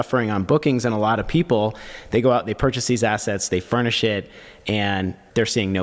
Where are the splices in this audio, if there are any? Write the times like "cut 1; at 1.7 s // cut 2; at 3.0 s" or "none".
none